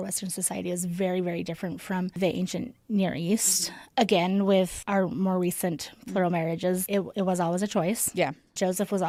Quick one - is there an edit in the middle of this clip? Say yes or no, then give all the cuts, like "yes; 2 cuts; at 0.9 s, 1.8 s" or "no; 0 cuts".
no; 0 cuts